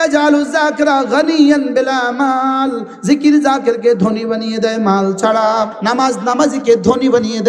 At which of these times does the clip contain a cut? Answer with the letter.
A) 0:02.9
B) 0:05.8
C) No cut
B